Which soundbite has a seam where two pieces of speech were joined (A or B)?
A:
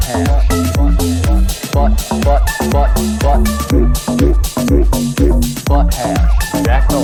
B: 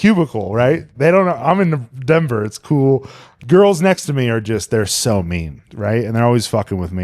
B